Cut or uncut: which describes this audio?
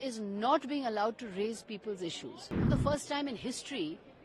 cut